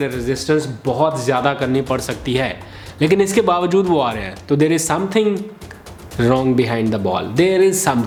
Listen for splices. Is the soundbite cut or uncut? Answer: uncut